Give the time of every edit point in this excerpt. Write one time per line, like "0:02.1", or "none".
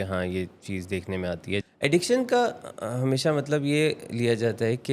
0:01.6